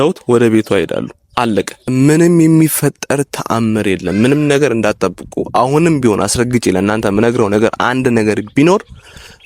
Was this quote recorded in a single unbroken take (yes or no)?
no